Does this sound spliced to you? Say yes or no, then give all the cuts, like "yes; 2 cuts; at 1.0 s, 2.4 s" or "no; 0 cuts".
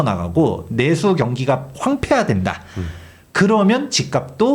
no; 0 cuts